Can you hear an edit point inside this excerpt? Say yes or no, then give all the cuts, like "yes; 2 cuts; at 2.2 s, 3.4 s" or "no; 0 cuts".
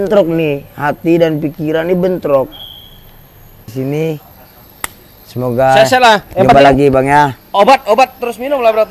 yes; 1 cut; at 3.7 s